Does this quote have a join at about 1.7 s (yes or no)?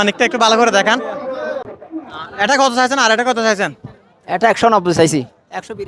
yes